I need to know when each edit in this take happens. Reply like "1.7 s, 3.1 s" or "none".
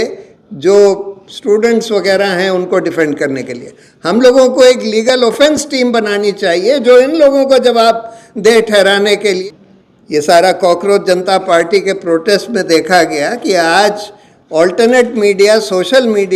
9.4 s